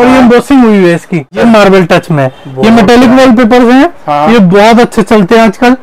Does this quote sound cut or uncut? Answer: cut